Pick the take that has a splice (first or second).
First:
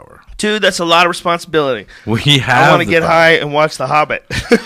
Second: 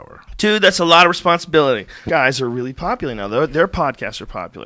first